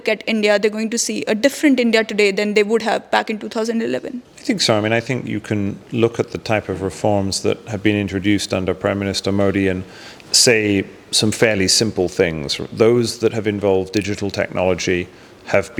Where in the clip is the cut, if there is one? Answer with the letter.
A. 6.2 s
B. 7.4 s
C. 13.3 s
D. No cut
D